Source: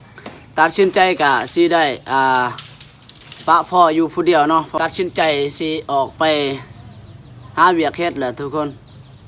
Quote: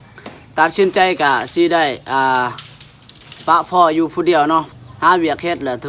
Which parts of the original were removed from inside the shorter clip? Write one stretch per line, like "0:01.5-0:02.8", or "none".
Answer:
0:04.7-0:07.2